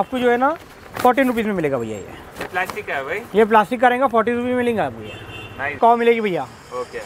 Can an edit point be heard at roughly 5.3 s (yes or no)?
no